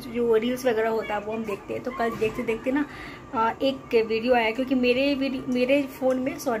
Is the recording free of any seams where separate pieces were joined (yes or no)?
yes